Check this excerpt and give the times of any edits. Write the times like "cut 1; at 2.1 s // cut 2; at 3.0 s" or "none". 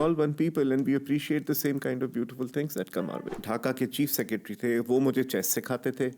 cut 1; at 3.1 s